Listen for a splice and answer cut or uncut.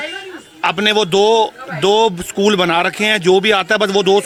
uncut